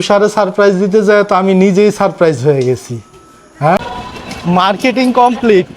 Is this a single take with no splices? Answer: no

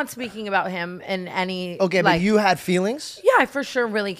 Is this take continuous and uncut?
yes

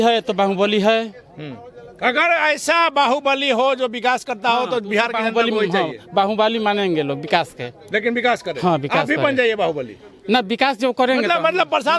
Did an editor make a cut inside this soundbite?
no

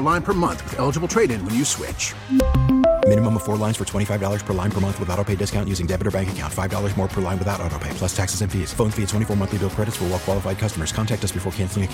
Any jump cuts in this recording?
no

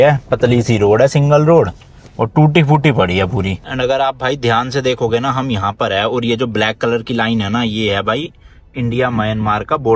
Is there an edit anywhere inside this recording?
yes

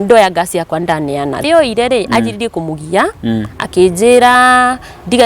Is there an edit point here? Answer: yes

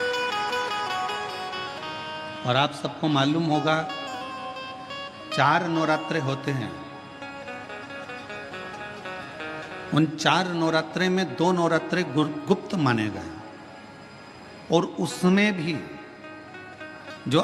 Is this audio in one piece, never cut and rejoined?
yes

